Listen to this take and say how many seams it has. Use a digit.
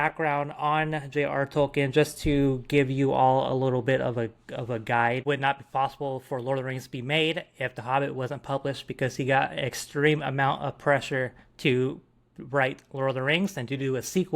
1